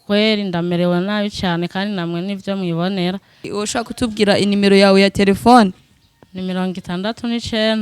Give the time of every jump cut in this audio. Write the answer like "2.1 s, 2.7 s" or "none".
3.4 s